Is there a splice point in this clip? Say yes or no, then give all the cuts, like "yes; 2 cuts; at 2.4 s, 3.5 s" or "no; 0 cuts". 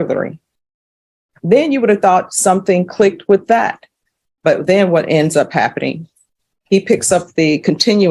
no; 0 cuts